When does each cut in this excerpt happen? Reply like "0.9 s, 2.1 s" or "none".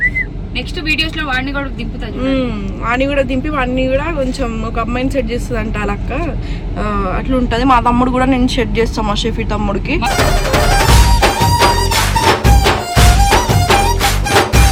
none